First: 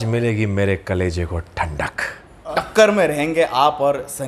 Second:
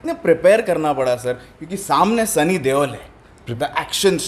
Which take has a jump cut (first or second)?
first